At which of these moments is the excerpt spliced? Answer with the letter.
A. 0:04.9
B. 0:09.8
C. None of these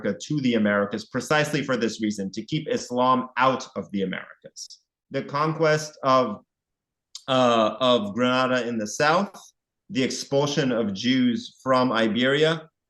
A